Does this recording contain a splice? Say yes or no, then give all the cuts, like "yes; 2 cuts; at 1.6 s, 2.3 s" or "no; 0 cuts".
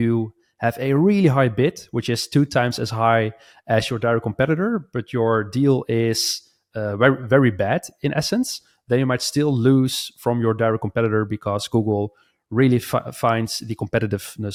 no; 0 cuts